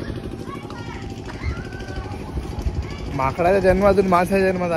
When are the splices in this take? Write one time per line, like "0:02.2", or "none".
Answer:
none